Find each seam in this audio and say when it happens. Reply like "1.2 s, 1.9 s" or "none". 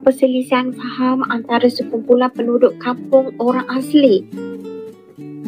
4.4 s